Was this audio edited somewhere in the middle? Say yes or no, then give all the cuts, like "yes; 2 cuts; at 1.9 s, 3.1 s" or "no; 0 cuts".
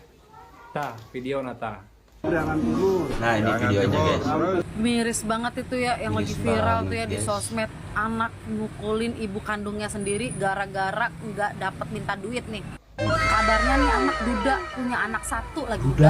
yes; 1 cut; at 4.6 s